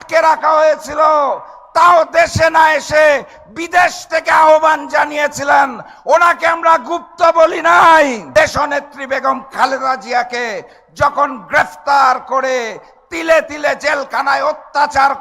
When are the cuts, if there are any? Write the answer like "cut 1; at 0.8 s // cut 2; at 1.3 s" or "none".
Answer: cut 1; at 8.2 s